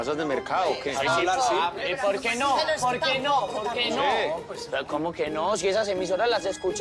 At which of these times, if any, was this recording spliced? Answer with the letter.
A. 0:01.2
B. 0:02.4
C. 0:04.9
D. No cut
C